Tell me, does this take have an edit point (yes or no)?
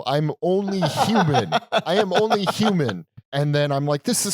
yes